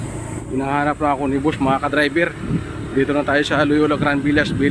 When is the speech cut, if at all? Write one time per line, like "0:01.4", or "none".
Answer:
none